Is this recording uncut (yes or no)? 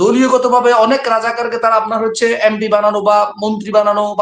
yes